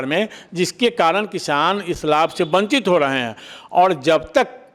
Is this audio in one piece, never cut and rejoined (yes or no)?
yes